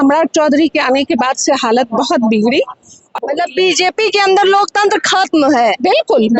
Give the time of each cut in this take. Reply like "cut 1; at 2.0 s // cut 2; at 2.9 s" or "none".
cut 1; at 3.2 s